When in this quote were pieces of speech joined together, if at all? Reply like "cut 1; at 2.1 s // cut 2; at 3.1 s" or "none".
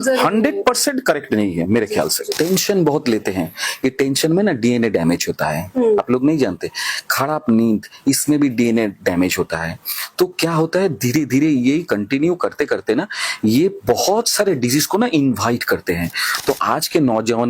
cut 1; at 2.2 s